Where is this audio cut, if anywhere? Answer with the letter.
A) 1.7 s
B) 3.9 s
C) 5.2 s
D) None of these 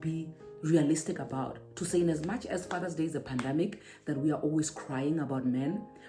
D